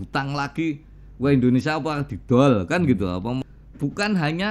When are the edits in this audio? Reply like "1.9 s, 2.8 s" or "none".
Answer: 3.4 s